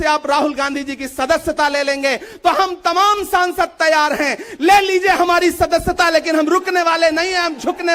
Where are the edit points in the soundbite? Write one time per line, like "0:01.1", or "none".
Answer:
none